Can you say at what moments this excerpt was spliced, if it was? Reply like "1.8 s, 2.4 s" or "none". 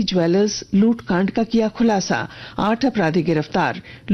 none